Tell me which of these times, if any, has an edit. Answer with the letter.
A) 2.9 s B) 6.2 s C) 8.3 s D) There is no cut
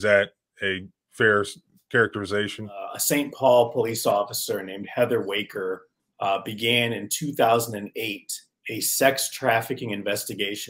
A